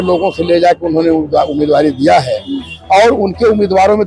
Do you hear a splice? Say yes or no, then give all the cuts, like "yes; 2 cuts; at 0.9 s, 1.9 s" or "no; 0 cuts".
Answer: no; 0 cuts